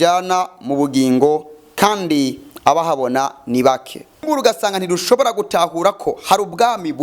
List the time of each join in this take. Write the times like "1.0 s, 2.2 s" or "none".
4.2 s